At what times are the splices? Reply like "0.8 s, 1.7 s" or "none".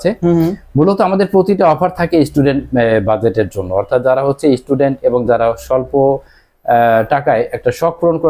none